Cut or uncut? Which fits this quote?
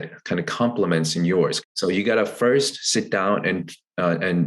cut